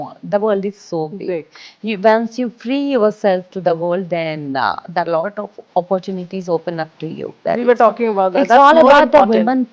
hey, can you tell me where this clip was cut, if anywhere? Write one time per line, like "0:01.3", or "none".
0:07.3